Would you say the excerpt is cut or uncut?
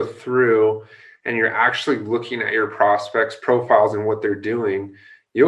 uncut